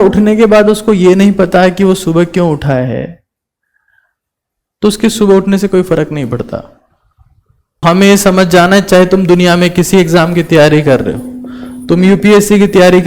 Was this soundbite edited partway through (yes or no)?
yes